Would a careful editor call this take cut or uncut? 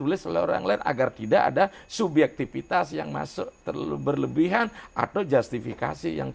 uncut